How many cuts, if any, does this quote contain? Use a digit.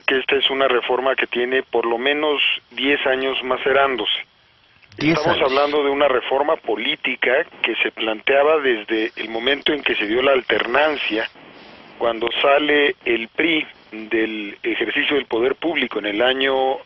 1